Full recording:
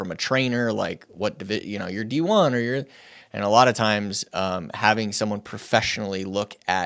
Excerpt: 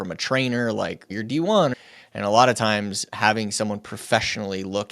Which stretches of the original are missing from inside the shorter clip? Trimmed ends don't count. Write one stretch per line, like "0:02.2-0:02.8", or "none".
0:01.1-0:01.9
0:02.6-0:03.0
0:04.3-0:04.7

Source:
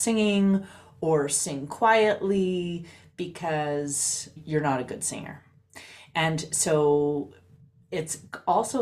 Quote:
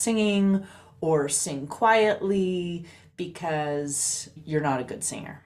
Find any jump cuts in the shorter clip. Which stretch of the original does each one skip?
none

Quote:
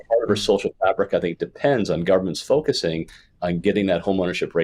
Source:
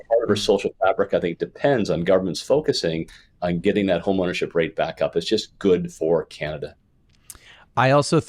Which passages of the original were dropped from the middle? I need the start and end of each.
none

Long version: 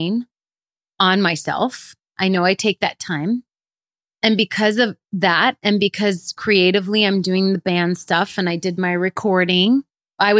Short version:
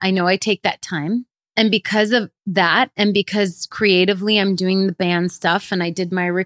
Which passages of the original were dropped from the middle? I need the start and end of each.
0:03.6-0:04.0

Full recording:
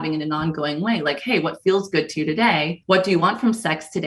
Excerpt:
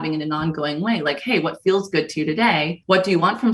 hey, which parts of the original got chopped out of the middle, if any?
none

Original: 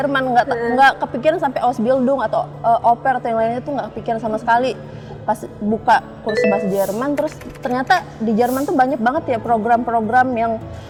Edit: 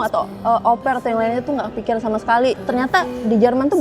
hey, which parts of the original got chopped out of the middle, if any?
0:04.8-0:07.6

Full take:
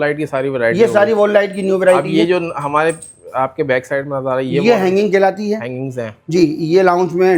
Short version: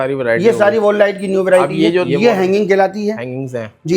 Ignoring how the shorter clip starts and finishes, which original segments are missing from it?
0:02.4-0:04.5

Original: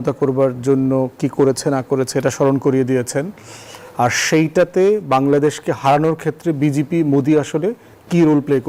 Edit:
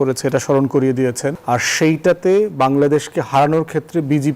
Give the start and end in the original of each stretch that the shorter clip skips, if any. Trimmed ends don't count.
0:03.3-0:03.9

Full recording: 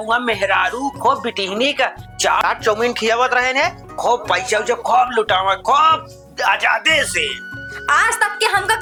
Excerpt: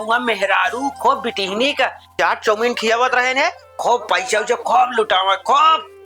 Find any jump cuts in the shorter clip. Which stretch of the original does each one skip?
0:02.2-0:02.4

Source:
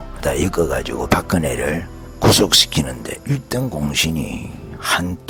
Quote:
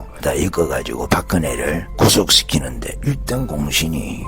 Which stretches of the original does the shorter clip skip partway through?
0:01.9-0:02.1

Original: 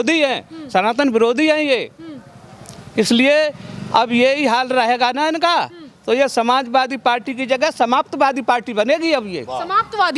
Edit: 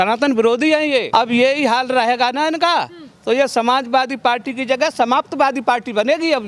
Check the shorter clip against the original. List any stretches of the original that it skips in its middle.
0:01.8-0:03.9

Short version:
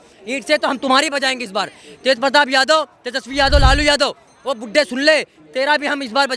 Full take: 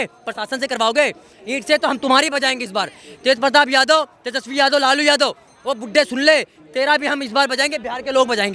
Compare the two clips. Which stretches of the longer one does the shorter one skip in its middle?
none

